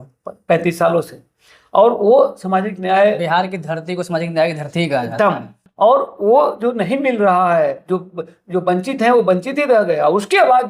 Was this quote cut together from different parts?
no; 0 cuts

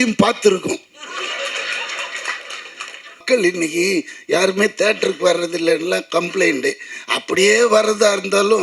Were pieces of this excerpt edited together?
yes; 1 cut; at 3.2 s

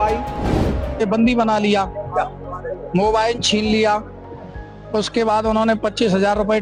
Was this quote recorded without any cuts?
yes; 0 cuts

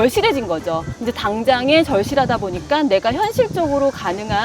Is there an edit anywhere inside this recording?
no; 0 cuts

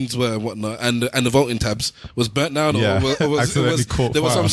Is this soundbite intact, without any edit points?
yes; 0 cuts

